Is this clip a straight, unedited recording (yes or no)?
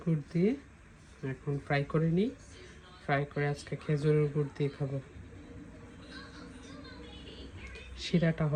yes